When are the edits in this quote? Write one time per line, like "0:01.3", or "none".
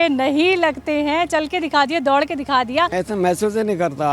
0:02.9

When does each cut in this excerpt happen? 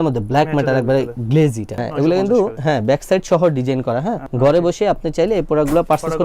0:01.9
0:04.2

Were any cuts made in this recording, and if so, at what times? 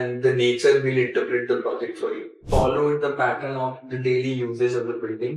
0:02.4

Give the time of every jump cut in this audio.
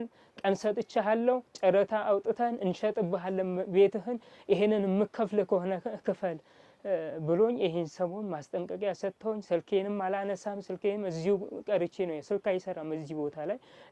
none

